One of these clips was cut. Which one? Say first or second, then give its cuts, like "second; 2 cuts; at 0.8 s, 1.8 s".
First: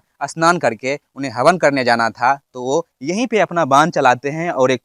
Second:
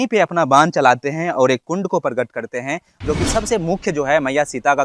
second; 1 cut; at 2.9 s